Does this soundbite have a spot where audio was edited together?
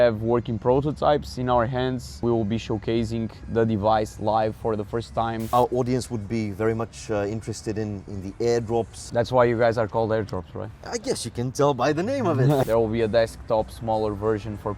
yes; 4 cuts; at 2.2 s, 5.5 s, 9.0 s, 12.6 s

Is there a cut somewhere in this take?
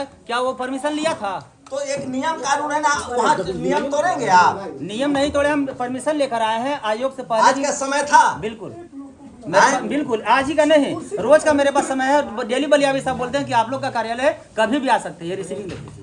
no; 0 cuts

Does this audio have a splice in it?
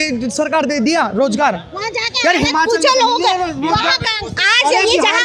no; 0 cuts

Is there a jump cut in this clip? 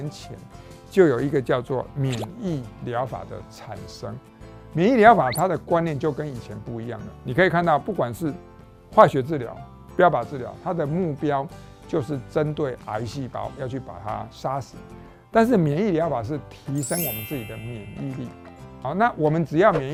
no; 0 cuts

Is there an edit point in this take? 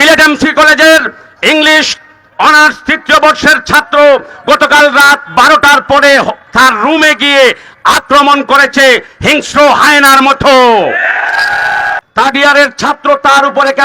yes; 1 cut; at 12.0 s

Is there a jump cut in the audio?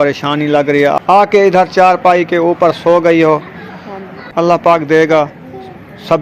yes; 2 cuts; at 1.1 s, 4.2 s

